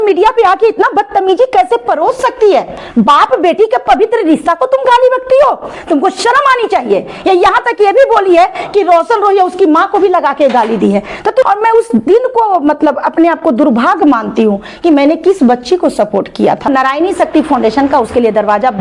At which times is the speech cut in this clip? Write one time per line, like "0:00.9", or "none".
0:02.8
0:11.5
0:16.7